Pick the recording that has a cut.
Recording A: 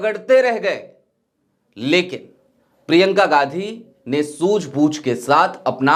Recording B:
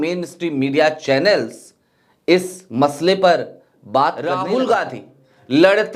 B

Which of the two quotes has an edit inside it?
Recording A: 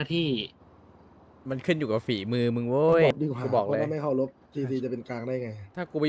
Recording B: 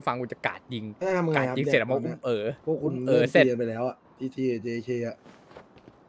A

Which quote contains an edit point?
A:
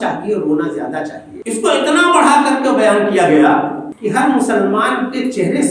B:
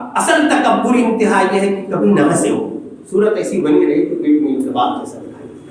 A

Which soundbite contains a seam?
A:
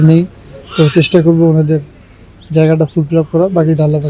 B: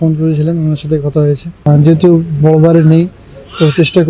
B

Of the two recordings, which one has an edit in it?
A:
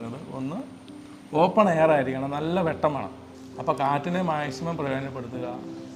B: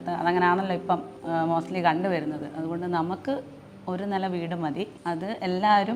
B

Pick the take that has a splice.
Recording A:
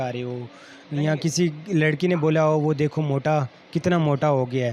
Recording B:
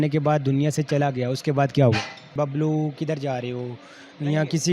B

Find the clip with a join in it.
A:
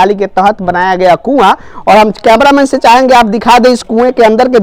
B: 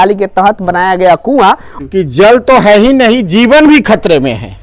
B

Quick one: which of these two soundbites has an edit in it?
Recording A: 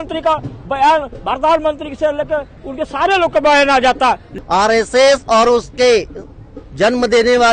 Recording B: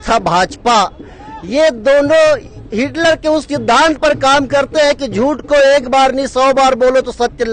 A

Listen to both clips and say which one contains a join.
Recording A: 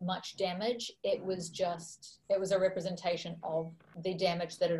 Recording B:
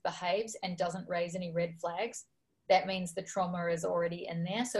A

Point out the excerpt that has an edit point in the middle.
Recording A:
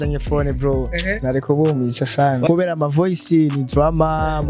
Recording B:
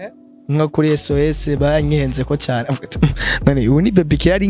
A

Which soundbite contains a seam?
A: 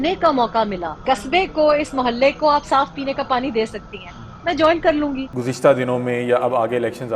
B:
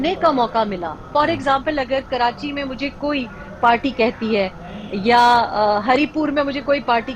A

